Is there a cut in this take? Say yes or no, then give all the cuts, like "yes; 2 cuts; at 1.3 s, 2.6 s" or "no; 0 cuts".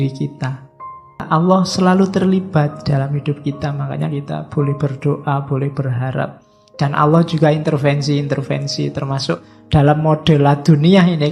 yes; 1 cut; at 1.3 s